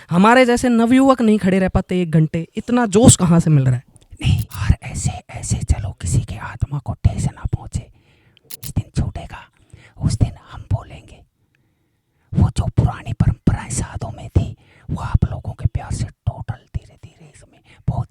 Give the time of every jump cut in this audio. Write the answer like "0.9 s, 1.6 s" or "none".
4.5 s, 8.7 s